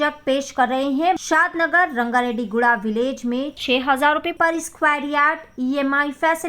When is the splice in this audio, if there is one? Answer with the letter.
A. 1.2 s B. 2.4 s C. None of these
A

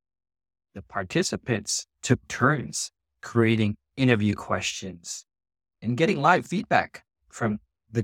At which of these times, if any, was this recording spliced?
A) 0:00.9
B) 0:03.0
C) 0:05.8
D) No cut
C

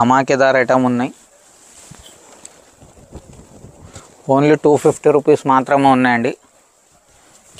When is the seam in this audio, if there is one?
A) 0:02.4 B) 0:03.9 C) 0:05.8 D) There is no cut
D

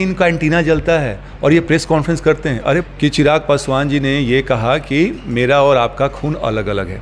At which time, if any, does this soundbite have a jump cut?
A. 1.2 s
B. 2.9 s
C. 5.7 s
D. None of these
B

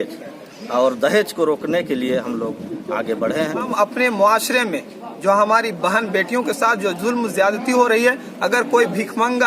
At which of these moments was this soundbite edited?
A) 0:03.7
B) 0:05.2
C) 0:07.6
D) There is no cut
A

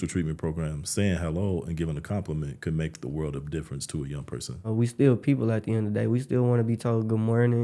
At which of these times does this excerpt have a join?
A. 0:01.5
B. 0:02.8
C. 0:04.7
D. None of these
C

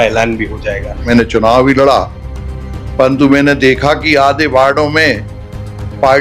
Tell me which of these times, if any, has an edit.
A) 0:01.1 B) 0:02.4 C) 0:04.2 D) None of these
A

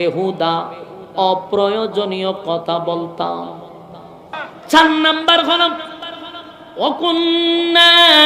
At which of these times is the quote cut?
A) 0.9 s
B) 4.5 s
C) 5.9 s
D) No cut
B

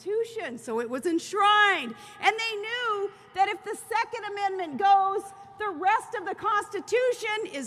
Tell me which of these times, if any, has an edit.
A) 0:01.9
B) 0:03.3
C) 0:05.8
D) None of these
B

